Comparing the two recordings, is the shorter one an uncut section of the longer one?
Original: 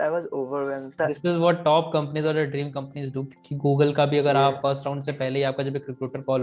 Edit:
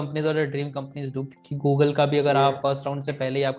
yes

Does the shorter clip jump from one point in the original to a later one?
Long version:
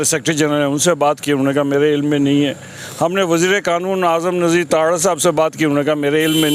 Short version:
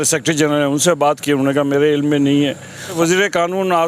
yes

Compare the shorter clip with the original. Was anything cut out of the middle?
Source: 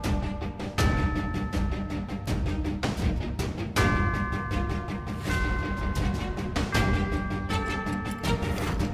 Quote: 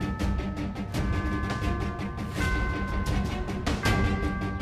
yes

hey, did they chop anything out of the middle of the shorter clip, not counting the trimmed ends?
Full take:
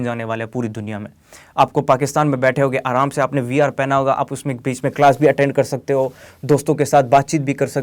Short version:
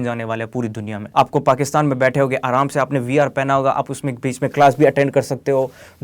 yes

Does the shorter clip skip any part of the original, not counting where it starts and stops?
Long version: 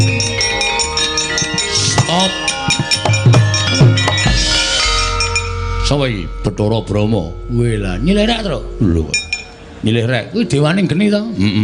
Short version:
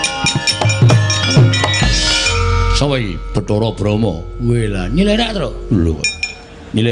yes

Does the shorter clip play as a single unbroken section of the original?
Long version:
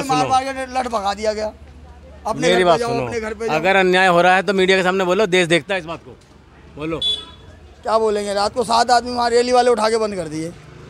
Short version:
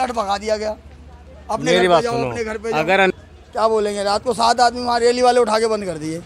no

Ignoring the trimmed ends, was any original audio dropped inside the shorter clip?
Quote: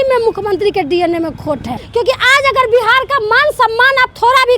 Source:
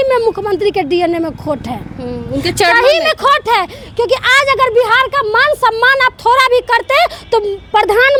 yes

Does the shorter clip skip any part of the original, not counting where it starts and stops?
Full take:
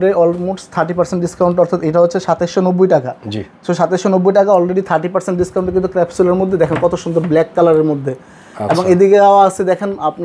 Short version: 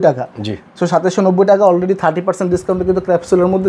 no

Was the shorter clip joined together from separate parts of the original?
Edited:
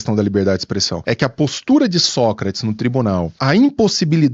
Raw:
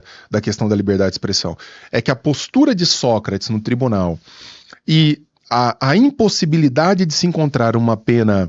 yes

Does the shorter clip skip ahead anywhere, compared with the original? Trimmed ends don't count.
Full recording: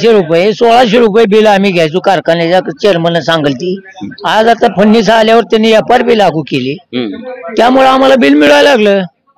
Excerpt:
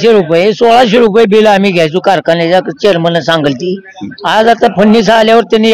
no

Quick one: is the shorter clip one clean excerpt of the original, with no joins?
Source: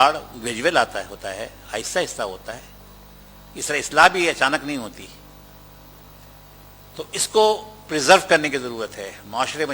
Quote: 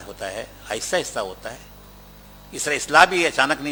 yes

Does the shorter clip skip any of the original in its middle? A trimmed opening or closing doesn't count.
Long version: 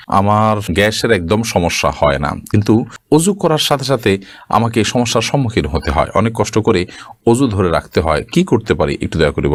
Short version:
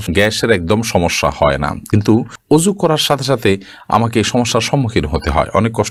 no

